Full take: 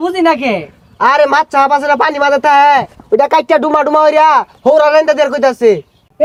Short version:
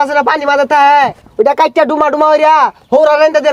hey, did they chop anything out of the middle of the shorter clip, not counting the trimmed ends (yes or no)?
no